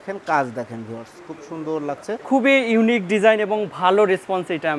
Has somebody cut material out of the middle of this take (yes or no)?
yes